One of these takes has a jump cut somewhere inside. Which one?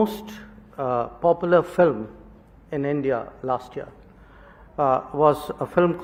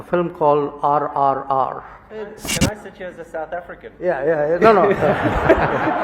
second; 1 cut; at 2.5 s

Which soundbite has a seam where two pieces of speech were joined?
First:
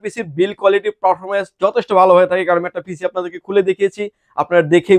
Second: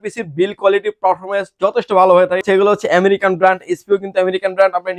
second; 1 cut; at 2.4 s

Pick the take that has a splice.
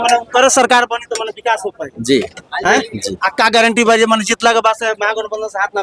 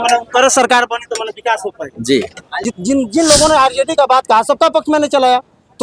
second; 1 cut; at 2.5 s

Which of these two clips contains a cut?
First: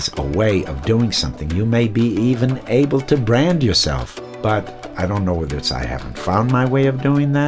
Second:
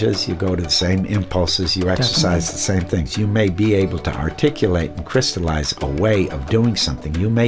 first; 2 cuts; at 4.1 s, 4.8 s

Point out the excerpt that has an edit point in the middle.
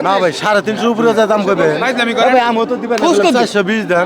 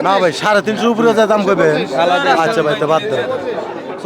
first; 1 cut; at 1.8 s

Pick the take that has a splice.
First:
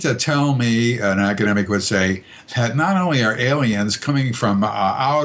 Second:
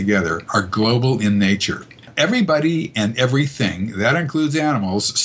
second; 1 cut; at 2.1 s

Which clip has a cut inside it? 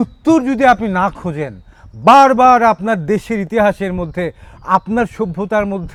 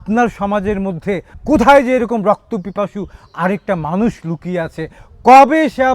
second; 1 cut; at 1.3 s

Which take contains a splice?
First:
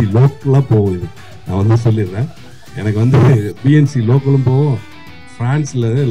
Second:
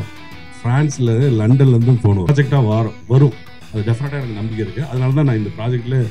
second; 1 cut; at 2.3 s

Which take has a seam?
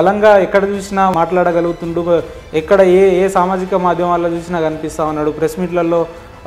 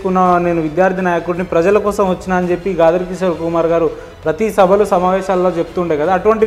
first; 1 cut; at 1.1 s

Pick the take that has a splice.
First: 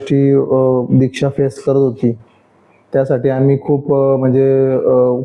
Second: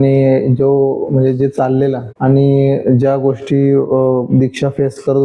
second; 1 cut; at 2.1 s

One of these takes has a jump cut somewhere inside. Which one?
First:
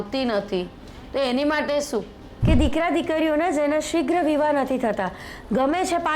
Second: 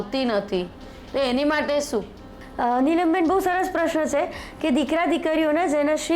first; 1 cut; at 2.3 s

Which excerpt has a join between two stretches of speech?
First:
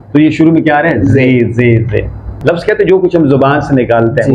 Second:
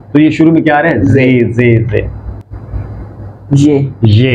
first; 1 cut; at 2.4 s

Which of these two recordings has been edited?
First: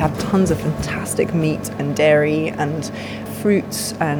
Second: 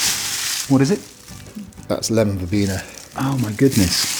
first; 1 cut; at 3.3 s

